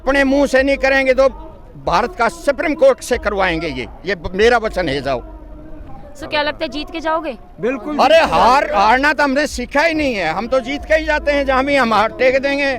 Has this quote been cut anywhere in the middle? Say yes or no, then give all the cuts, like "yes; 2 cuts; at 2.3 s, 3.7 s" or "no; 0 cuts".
no; 0 cuts